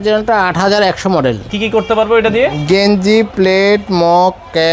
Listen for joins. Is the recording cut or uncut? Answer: cut